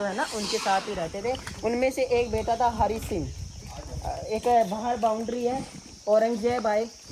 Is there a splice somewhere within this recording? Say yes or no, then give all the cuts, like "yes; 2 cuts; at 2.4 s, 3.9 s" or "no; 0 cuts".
no; 0 cuts